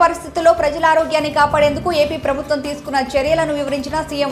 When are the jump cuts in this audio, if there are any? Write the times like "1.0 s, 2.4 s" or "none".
none